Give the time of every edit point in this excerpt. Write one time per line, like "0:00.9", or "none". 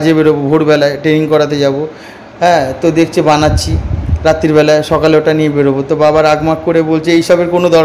none